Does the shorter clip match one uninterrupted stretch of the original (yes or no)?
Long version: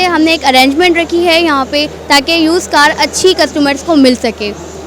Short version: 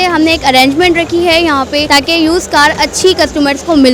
no